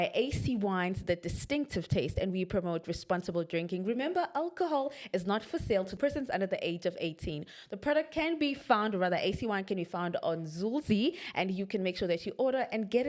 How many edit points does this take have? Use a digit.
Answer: 0